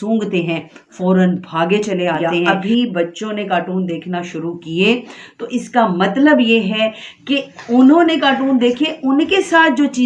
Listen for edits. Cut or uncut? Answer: cut